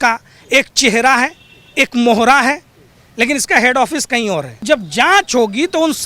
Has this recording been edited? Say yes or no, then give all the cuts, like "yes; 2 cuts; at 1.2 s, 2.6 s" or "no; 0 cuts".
yes; 1 cut; at 4.6 s